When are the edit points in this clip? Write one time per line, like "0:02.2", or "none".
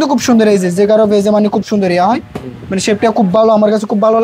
none